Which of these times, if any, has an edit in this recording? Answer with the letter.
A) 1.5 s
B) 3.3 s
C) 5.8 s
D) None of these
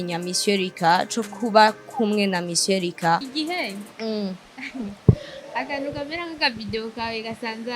B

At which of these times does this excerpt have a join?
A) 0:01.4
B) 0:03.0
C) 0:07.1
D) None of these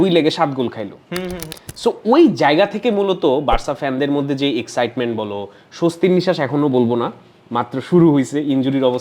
A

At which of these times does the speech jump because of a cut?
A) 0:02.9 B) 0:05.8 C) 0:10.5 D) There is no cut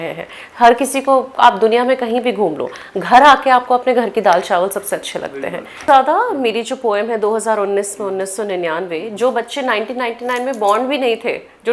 B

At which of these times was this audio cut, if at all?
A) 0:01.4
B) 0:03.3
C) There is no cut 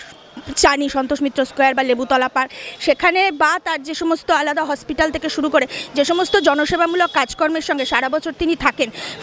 C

